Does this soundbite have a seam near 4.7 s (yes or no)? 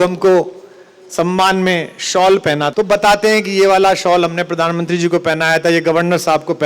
no